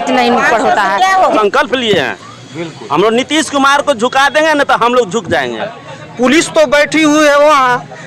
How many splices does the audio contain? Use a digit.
2